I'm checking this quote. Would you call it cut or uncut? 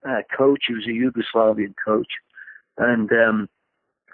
uncut